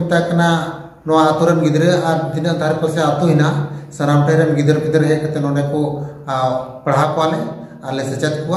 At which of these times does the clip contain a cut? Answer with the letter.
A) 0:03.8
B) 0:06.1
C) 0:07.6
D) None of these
D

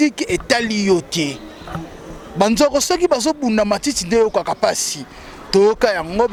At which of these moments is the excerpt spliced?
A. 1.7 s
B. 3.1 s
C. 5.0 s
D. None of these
D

